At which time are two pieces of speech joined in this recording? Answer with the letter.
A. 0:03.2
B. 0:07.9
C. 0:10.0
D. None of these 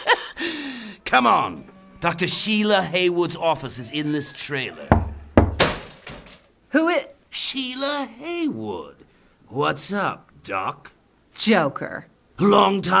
A